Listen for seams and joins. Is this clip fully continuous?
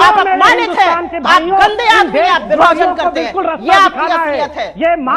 yes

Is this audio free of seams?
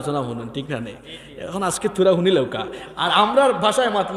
yes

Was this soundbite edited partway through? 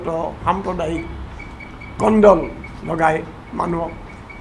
no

